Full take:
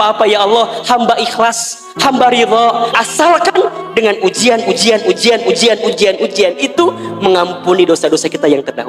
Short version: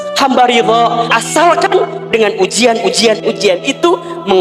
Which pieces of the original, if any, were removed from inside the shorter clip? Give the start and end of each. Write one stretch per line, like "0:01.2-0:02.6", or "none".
0:05.0-0:06.1